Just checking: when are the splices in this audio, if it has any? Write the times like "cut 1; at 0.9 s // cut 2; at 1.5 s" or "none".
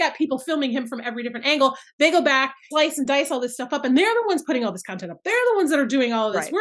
cut 1; at 2.6 s